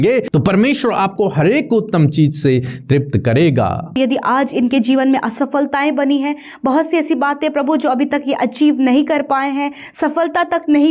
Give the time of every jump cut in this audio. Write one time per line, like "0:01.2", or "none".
0:04.0